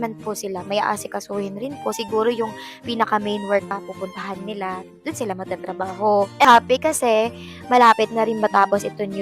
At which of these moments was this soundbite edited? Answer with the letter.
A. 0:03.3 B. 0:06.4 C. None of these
B